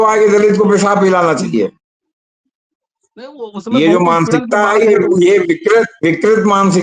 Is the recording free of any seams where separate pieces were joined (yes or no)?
yes